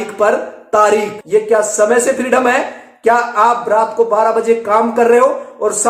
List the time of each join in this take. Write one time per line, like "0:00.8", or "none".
0:01.2